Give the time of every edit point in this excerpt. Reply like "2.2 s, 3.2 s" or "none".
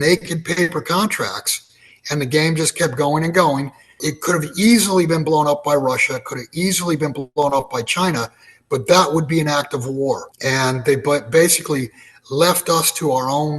4.0 s, 10.3 s

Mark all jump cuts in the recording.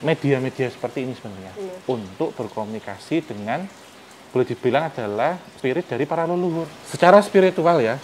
5.5 s, 6.8 s

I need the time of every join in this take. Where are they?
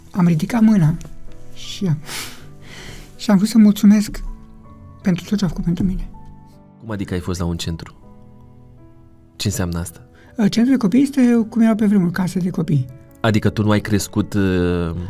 6.8 s

